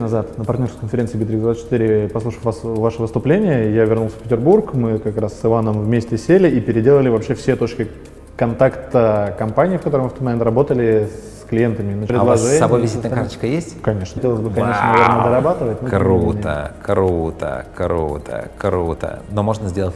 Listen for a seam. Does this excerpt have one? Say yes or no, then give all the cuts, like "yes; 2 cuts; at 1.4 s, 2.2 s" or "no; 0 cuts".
yes; 2 cuts; at 12.1 s, 14.2 s